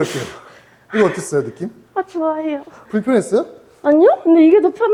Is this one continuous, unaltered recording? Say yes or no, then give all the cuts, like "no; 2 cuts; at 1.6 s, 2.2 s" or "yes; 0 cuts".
yes; 0 cuts